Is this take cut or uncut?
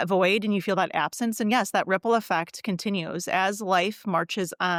uncut